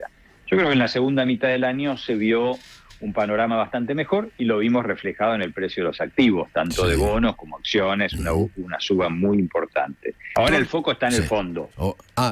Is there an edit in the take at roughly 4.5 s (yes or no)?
no